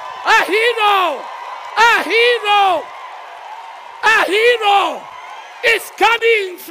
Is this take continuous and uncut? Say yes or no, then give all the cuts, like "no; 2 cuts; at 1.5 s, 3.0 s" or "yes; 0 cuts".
yes; 0 cuts